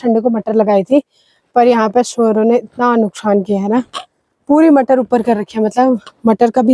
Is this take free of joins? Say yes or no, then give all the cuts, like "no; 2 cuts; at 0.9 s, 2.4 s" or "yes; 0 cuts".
yes; 0 cuts